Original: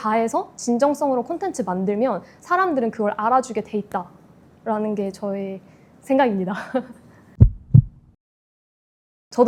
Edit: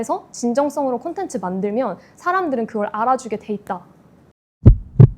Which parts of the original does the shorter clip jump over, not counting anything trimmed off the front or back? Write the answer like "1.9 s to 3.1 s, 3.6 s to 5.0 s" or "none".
4.5 s to 7.0 s